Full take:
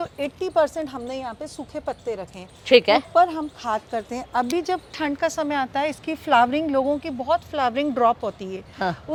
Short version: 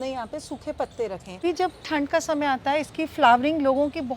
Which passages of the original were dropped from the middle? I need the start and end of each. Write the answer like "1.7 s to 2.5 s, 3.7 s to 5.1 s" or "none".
2.5 s to 4.5 s